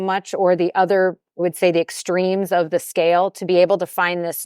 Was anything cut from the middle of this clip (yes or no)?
yes